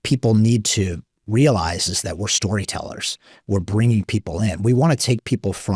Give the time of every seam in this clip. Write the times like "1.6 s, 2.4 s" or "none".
none